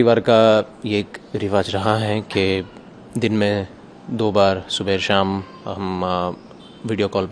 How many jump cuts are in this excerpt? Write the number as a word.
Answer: zero